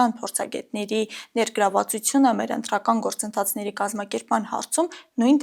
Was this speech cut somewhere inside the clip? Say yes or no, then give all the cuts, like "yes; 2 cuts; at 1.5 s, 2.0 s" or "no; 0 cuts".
no; 0 cuts